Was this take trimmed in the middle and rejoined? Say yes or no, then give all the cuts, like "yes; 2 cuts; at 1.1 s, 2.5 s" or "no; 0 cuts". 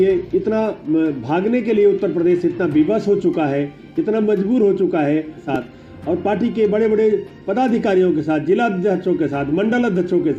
yes; 1 cut; at 5.5 s